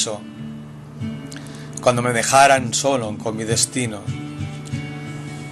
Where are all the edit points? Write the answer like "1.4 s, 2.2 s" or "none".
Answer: none